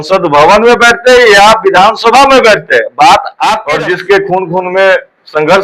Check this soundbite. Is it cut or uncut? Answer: cut